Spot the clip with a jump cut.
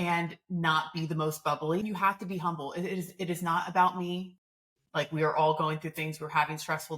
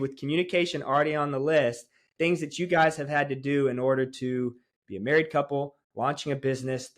first; 1 cut; at 1.8 s

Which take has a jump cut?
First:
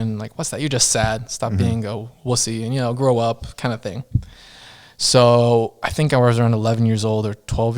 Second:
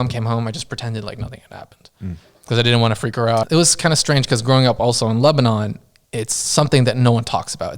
second; 1 cut; at 3.5 s

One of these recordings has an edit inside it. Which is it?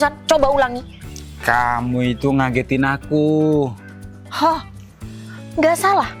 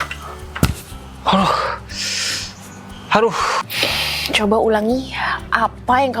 second; 1 cut; at 3.7 s

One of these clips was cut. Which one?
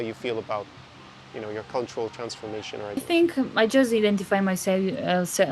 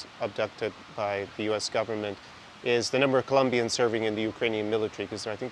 first; 1 cut; at 2.9 s

